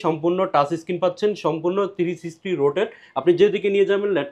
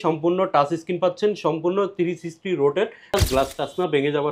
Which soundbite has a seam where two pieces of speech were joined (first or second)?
second